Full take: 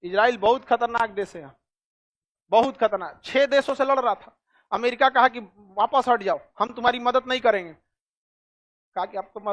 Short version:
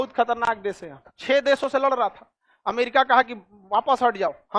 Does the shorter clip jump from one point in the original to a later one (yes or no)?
yes